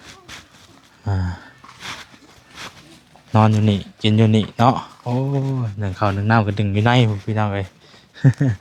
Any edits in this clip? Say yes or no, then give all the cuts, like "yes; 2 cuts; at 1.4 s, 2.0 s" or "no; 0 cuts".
no; 0 cuts